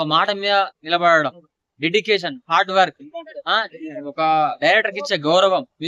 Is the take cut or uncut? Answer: uncut